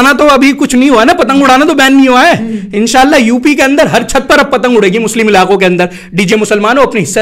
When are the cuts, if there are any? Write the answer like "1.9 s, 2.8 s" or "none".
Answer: 6.3 s